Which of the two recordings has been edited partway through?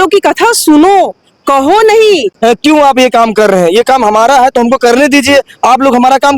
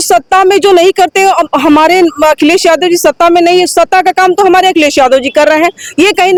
first; 1 cut; at 2.3 s

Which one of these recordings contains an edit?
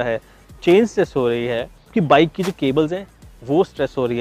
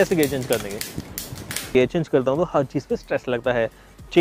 second; 1 cut; at 1.7 s

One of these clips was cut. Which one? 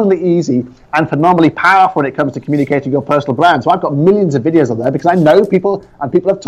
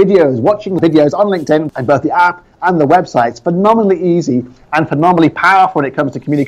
second; 2 cuts; at 0.8 s, 1.7 s

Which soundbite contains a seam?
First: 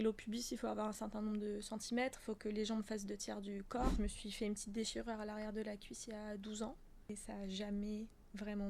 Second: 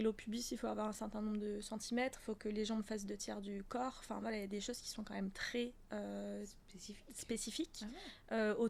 first; 2 cuts; at 3.9 s, 7.1 s

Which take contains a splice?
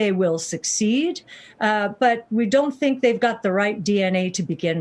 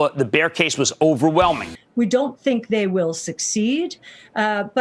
second; 1 cut; at 1.8 s

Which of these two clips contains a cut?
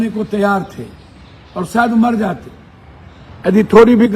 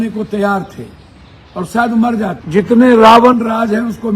second; 1 cut; at 2.4 s

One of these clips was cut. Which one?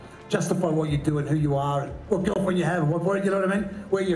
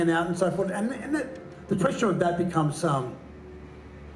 first; 1 cut; at 2.0 s

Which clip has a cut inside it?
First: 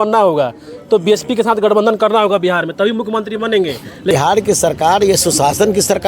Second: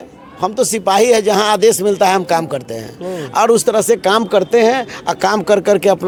first; 1 cut; at 4.1 s

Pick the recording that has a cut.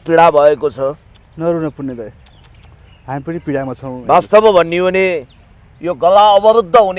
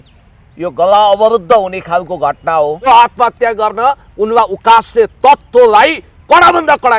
second; 1 cut; at 2.9 s

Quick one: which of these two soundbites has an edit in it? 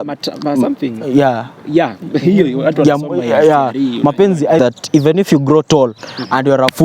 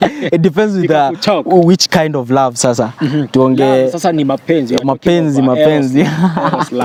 first; 1 cut; at 4.6 s

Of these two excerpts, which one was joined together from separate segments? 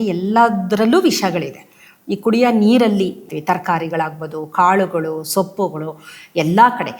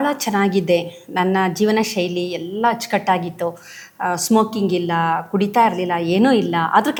first; 1 cut; at 3.3 s

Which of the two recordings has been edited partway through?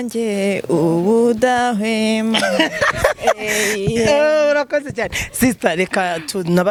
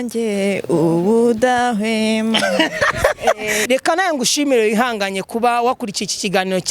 second; 1 cut; at 3.5 s

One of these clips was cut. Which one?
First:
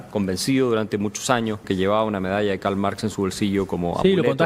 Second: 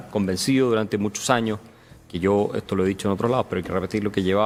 first; 1 cut; at 1.6 s

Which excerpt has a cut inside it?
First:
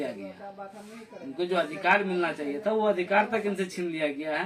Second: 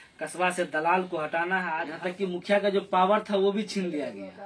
second; 1 cut; at 1.9 s

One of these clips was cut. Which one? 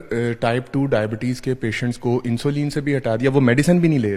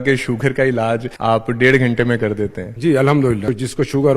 second; 3 cuts; at 1.1 s, 2.6 s, 3.5 s

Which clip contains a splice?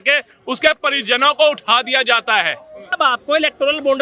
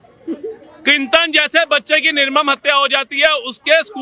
first; 1 cut; at 3.0 s

